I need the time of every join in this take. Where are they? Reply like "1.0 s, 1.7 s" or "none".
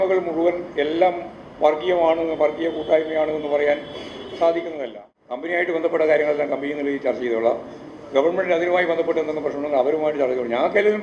5.4 s